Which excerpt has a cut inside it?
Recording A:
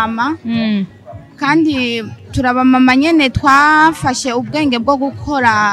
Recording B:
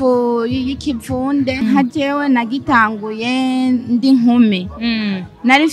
B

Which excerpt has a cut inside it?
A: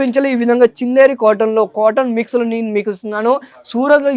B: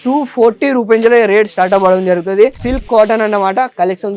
B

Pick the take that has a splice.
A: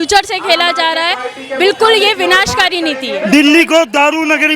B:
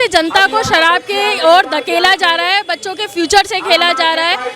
A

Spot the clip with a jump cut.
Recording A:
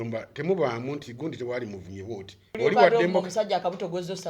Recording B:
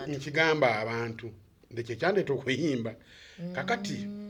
A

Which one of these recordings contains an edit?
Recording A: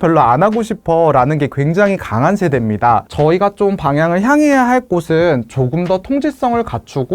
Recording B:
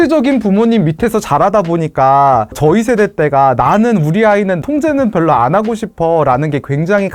A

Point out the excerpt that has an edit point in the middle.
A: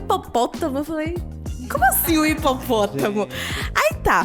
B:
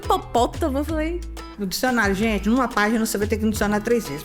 B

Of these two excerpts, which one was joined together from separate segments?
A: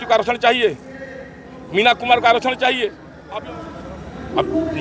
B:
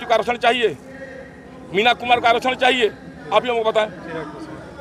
A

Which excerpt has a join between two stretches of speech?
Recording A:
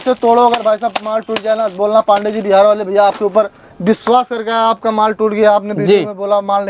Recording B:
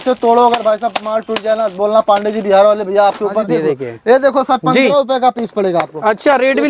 B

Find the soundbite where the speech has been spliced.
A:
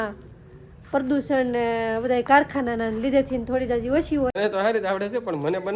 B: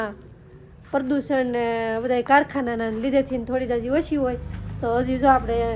A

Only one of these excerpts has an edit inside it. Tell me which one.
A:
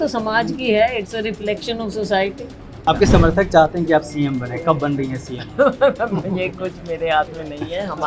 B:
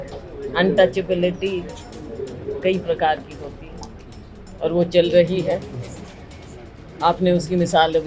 A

